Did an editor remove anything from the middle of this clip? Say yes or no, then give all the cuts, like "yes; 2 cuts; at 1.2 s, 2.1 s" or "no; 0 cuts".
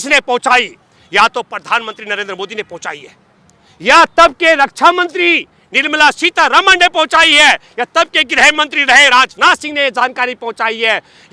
no; 0 cuts